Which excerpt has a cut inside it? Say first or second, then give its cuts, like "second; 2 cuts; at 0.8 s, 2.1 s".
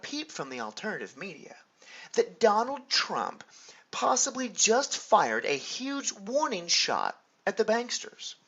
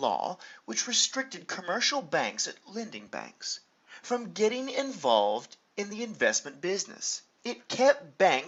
first; 1 cut; at 2.9 s